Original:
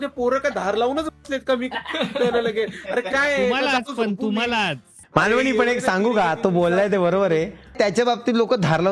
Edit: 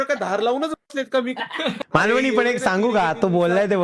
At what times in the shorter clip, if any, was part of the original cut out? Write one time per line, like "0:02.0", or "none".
0:01.8